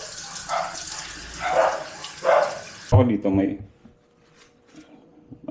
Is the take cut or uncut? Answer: cut